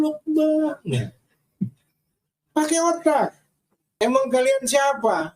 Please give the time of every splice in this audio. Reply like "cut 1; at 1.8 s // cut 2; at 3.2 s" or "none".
cut 1; at 3.9 s